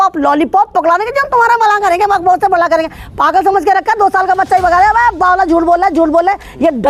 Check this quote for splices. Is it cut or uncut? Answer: uncut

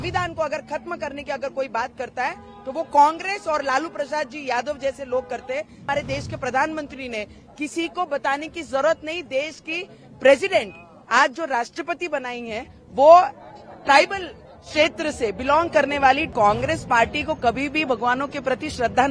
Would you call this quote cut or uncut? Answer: cut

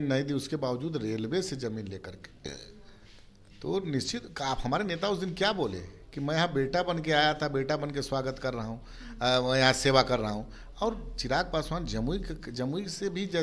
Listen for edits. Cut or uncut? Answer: uncut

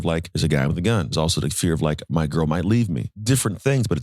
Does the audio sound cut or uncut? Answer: cut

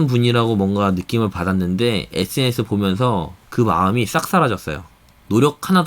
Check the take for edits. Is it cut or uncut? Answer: cut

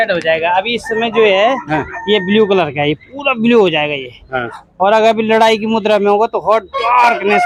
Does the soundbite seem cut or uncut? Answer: uncut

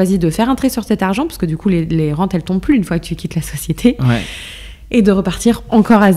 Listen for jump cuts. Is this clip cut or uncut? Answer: uncut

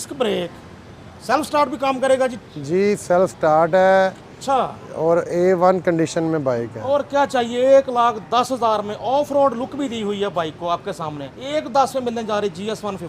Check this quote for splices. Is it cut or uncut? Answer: cut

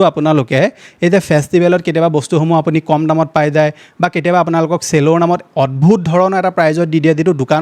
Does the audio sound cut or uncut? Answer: uncut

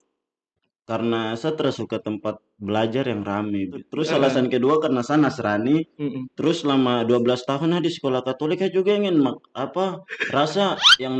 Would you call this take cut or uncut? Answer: cut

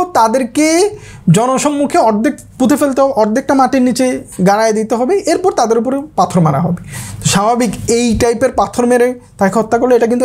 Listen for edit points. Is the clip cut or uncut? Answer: uncut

